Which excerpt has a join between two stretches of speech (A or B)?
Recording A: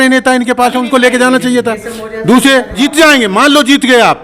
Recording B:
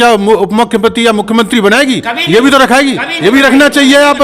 A